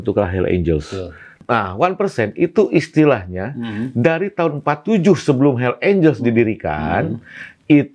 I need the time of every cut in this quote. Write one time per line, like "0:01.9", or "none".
0:01.4